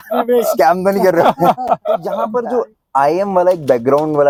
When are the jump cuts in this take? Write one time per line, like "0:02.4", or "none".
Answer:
none